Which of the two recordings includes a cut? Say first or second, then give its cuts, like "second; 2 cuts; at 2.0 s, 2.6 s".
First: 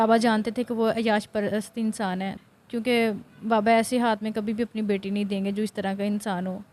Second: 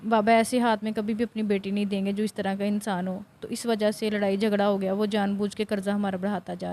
first; 1 cut; at 2.5 s